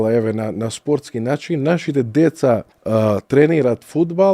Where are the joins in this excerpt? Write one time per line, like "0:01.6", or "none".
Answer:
0:02.7